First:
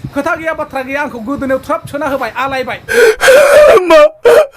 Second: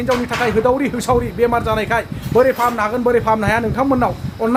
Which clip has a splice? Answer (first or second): first